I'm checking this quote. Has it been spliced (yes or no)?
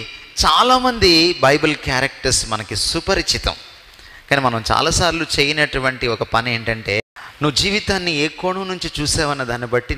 yes